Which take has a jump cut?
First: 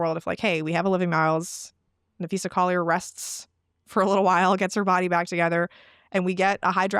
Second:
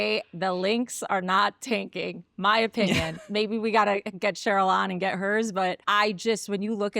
second; 1 cut; at 5.8 s

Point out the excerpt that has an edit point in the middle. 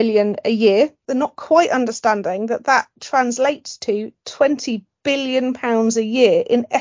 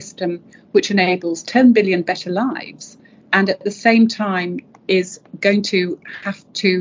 first; 1 cut; at 1.0 s

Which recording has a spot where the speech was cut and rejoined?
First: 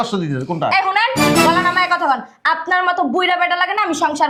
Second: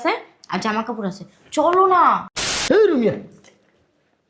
second; 1 cut; at 2.5 s

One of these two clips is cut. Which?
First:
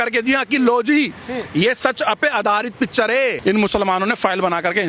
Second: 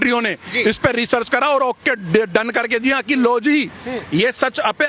first; 1 cut; at 3.4 s

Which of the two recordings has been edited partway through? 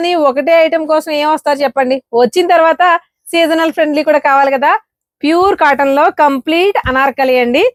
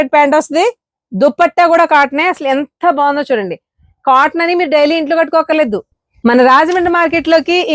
second; 1 cut; at 5.9 s

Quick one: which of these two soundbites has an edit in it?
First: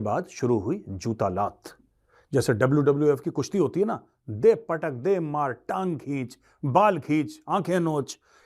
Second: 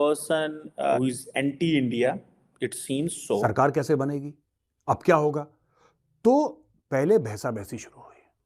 second; 2 cuts; at 1.0 s, 3.4 s

